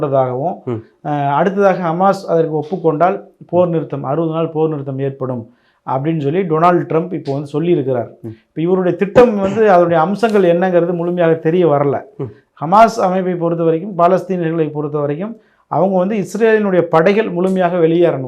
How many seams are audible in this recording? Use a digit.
0